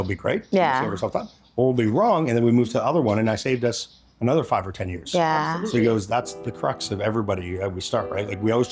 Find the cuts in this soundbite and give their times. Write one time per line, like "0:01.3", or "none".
none